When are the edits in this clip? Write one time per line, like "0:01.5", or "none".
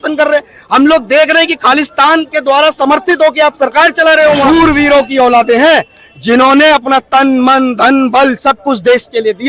0:04.4